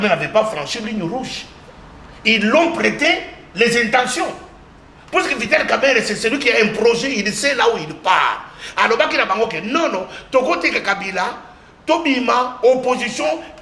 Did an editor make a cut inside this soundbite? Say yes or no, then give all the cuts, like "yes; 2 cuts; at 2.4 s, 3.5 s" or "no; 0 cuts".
no; 0 cuts